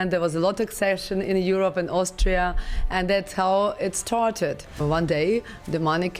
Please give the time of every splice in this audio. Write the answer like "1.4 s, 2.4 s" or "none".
4.8 s